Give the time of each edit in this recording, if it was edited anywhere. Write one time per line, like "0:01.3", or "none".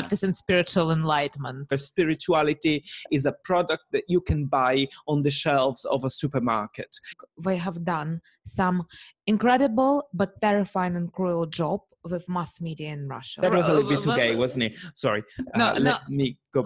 0:01.8
0:07.1
0:13.4